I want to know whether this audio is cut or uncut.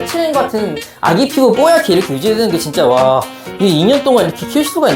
uncut